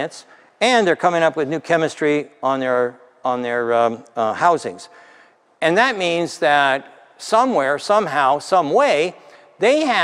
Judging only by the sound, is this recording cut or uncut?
uncut